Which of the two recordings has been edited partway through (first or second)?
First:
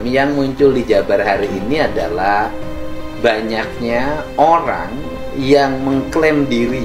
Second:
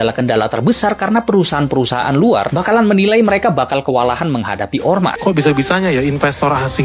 second